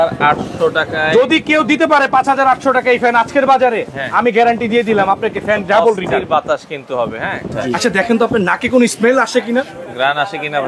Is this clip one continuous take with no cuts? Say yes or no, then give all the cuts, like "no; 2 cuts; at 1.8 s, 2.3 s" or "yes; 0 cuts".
no; 1 cut; at 7.5 s